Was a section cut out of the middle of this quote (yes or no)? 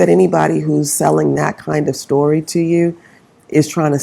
no